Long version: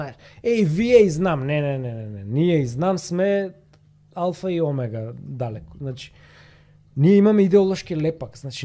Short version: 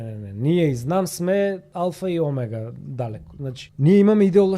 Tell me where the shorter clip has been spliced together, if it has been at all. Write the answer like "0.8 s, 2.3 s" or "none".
1.7 s, 3.6 s